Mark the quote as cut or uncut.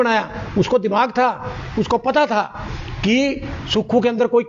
uncut